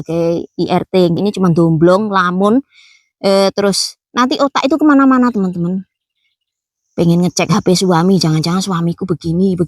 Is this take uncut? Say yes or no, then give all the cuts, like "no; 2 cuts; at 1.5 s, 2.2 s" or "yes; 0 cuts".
no; 1 cut; at 1.2 s